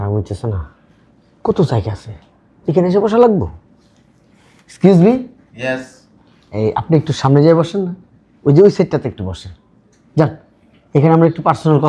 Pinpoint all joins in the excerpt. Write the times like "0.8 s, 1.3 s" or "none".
none

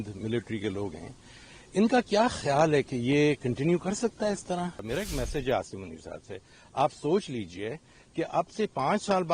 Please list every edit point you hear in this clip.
4.8 s

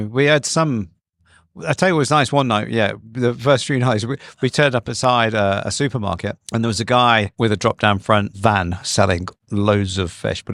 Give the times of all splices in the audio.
6.4 s, 7.3 s, 8.3 s

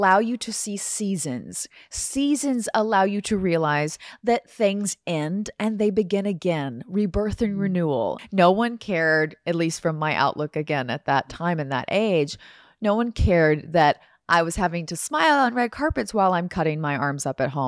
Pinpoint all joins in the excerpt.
8.2 s

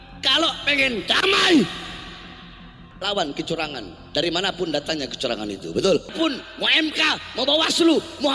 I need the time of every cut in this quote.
6.1 s

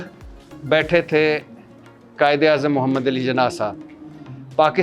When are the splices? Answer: none

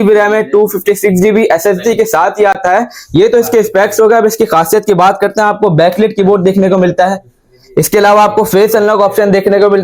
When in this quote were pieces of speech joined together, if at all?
none

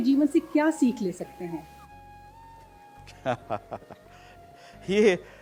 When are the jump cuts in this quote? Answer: none

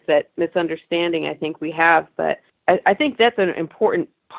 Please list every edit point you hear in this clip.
2.5 s

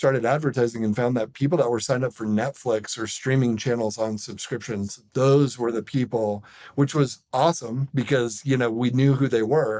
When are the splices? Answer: none

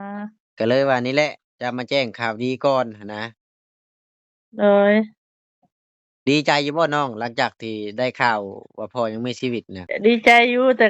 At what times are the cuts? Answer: 9.9 s

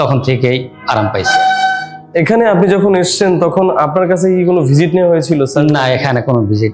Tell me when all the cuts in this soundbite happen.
2.1 s

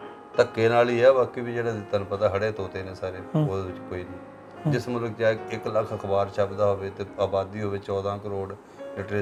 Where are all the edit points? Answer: none

